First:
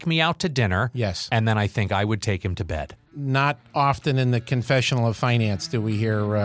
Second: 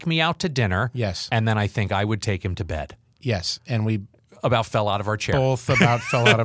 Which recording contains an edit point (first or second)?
first